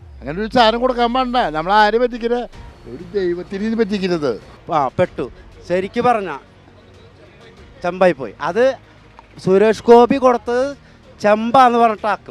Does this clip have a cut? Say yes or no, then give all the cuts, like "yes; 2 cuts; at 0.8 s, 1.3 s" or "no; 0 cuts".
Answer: yes; 1 cut; at 4.5 s